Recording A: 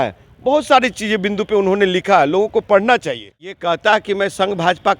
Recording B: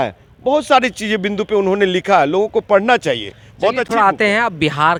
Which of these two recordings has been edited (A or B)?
A